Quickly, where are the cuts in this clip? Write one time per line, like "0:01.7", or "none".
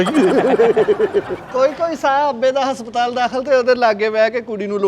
0:01.3